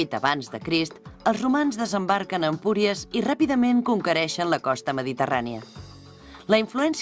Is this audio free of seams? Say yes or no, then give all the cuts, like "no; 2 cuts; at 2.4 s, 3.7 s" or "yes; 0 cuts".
no; 1 cut; at 2.1 s